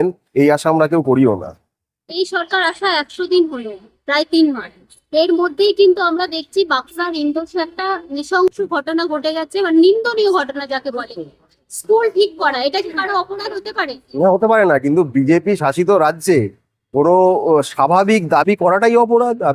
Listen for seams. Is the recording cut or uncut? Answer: uncut